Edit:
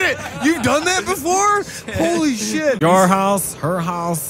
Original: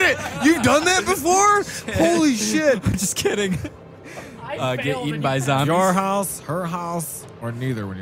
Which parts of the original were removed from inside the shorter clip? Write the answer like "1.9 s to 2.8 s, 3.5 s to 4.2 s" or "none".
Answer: 2.8 s to 5.7 s